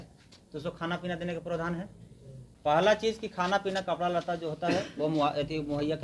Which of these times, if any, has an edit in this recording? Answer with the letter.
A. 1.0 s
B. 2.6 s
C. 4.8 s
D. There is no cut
D